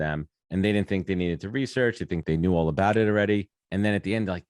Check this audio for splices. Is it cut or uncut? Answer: cut